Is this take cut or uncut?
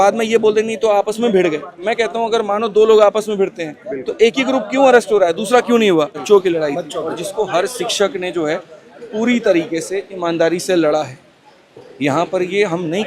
cut